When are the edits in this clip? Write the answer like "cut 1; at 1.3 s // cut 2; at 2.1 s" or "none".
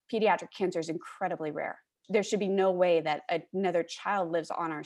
cut 1; at 1.9 s